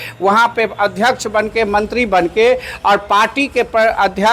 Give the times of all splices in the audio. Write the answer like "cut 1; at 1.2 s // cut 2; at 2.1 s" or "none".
none